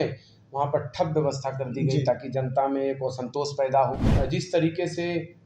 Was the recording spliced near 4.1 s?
yes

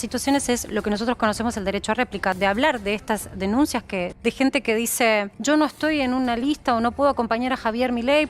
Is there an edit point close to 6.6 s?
no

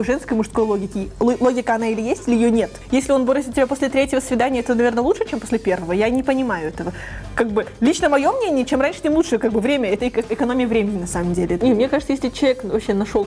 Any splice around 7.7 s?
no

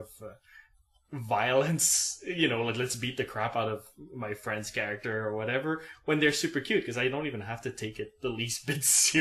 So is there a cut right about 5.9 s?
yes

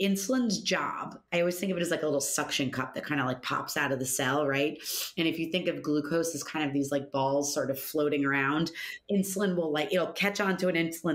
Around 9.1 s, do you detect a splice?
no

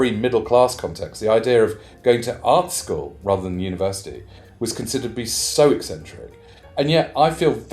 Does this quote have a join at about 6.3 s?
no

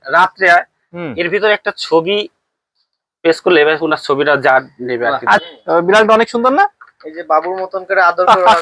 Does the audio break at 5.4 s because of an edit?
yes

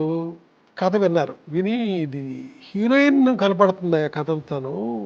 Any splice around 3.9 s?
no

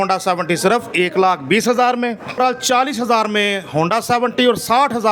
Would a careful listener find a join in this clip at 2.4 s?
yes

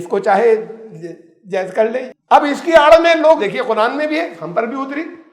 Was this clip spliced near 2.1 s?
yes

